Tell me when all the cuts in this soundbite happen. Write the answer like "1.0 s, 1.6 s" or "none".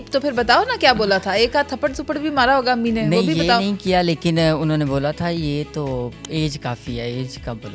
none